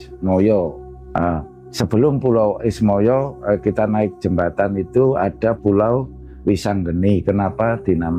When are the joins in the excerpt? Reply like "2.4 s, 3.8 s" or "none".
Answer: none